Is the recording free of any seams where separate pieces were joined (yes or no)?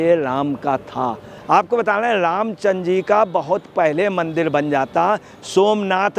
no